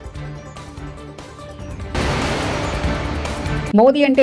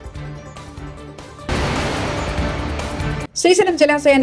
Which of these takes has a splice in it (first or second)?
first